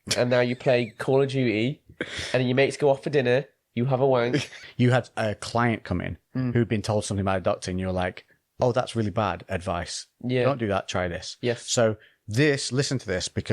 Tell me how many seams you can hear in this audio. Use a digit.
1